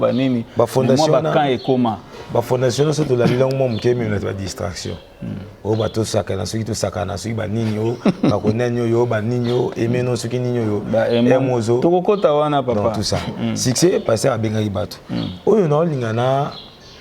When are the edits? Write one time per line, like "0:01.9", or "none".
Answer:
none